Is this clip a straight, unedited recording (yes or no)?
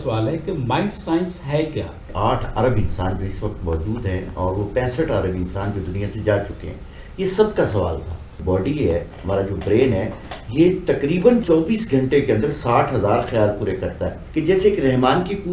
no